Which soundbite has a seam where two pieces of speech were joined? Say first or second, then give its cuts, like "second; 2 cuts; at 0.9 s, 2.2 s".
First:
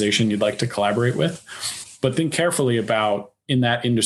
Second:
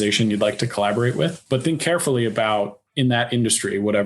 second; 1 cut; at 1.4 s